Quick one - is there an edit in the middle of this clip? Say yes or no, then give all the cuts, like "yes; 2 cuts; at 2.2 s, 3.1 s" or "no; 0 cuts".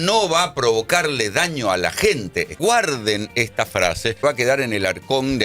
yes; 2 cuts; at 2.6 s, 4.2 s